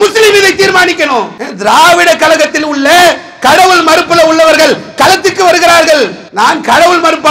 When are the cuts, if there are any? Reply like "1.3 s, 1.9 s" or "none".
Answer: 1.4 s, 6.2 s